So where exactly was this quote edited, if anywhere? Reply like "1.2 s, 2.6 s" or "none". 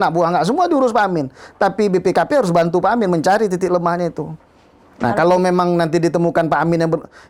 none